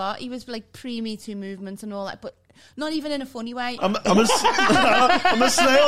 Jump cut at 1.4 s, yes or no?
no